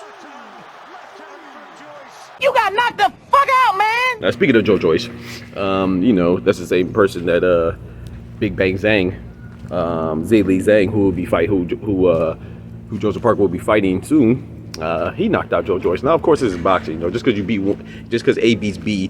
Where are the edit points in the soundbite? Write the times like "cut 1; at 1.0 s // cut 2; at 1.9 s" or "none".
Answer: cut 1; at 2.4 s // cut 2; at 4.1 s